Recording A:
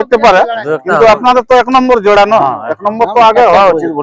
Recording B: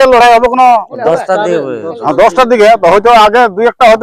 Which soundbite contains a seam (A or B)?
B